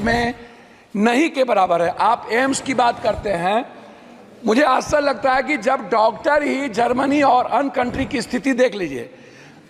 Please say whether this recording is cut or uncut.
uncut